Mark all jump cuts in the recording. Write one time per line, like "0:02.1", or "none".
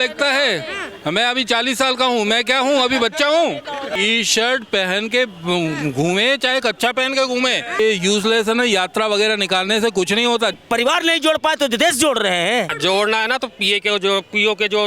0:03.9
0:07.8
0:10.5
0:12.7

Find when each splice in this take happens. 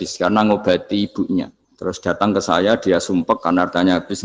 0:01.6

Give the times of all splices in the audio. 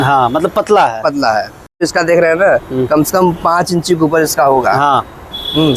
0:01.8

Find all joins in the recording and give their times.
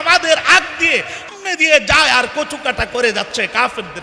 0:01.3

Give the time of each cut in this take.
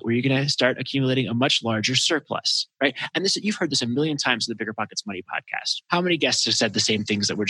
0:05.7

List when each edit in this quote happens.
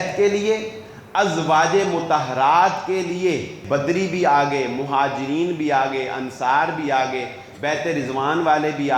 0:03.6

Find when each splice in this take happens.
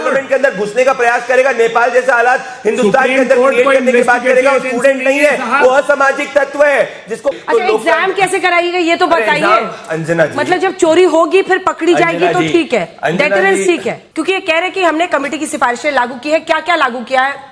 0:07.3
0:14.0

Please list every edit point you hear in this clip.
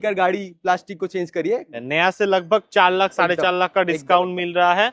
0:01.8

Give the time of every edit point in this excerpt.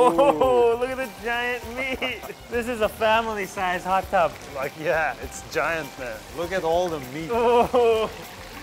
none

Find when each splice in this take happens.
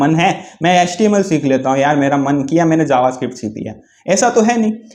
none

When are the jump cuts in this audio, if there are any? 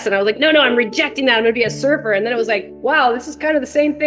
none

